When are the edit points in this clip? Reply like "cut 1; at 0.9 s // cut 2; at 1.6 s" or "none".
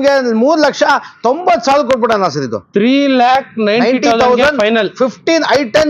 none

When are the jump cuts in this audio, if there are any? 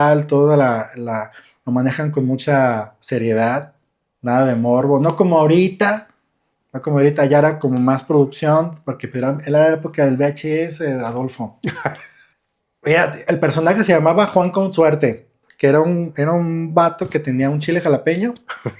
cut 1; at 12.3 s // cut 2; at 15.4 s

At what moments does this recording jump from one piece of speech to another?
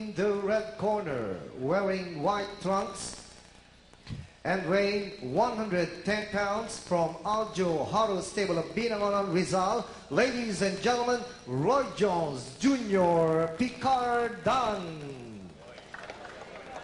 cut 1; at 10.1 s

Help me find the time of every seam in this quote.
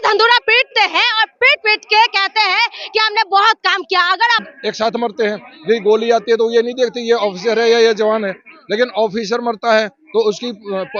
cut 1; at 4.4 s

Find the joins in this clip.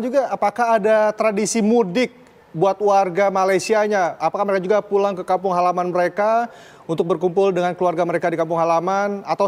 none

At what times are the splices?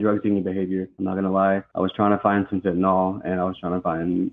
cut 1; at 0.9 s // cut 2; at 1.7 s

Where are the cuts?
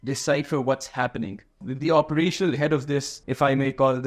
cut 1; at 1.6 s // cut 2; at 3.2 s

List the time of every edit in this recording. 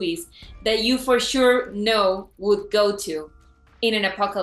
none

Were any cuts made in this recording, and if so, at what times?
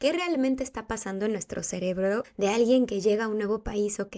cut 1; at 2.3 s

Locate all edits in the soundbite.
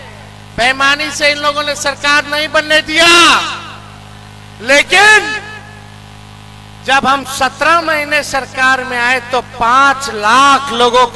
none

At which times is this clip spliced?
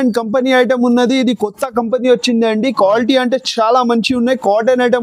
none

